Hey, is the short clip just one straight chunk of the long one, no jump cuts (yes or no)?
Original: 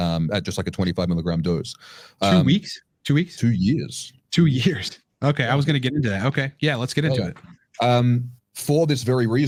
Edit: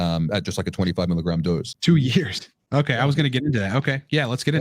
no